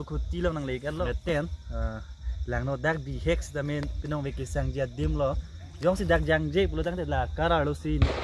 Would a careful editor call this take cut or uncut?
cut